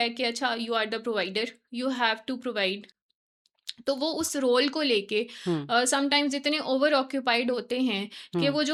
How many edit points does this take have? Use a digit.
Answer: 0